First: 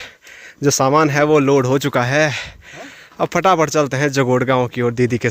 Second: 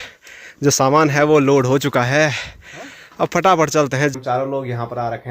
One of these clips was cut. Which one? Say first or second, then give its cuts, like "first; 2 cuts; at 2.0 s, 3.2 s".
second; 1 cut; at 4.1 s